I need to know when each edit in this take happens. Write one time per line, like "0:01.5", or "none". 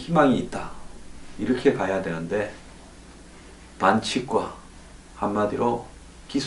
0:01.9